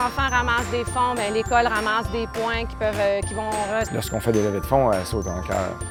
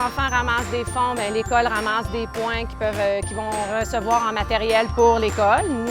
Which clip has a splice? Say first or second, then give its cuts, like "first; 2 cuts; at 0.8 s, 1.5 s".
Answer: second; 1 cut; at 3.9 s